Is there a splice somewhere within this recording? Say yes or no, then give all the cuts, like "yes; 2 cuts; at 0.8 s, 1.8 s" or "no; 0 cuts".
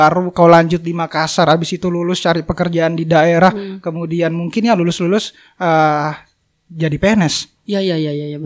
no; 0 cuts